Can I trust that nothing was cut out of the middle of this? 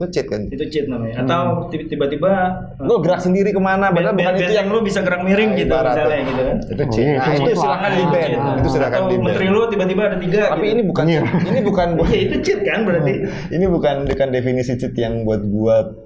yes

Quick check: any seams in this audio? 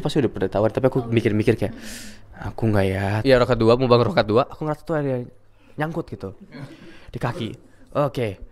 yes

